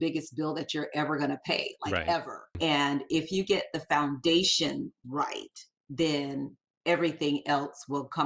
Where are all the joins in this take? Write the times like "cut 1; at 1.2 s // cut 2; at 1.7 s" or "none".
cut 1; at 2.5 s